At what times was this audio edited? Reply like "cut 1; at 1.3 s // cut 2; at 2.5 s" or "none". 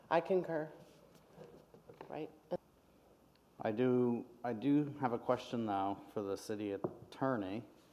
cut 1; at 2.6 s